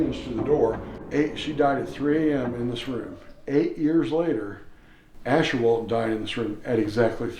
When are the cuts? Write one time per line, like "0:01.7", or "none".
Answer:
0:00.9